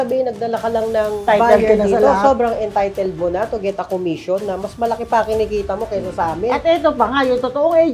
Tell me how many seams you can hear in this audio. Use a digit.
1